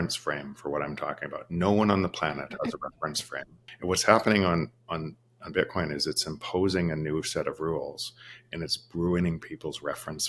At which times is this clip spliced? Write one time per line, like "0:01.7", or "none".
0:03.6